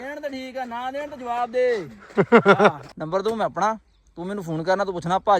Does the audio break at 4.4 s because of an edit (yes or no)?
no